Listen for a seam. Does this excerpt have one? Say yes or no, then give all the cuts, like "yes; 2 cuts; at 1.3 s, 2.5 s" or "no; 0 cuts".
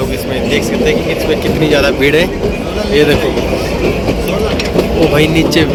no; 0 cuts